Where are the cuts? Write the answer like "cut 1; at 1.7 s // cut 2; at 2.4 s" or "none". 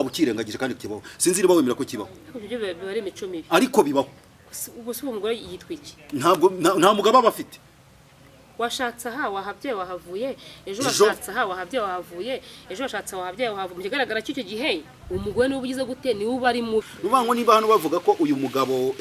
cut 1; at 16.9 s